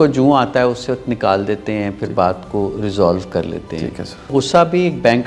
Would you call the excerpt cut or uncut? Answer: cut